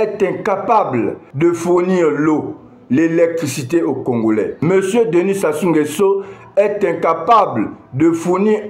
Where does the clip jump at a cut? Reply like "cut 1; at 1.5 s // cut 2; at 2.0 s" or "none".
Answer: none